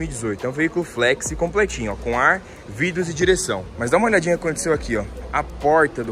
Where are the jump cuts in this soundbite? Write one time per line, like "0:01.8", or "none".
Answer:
0:03.7